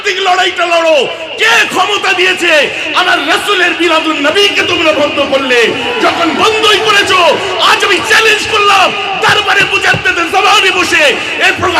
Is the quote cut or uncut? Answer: uncut